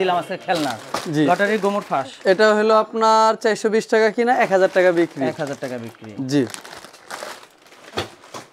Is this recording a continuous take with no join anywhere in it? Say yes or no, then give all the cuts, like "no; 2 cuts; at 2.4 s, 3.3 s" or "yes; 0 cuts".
yes; 0 cuts